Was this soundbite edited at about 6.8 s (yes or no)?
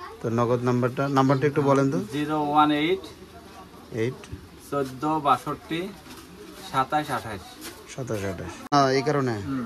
no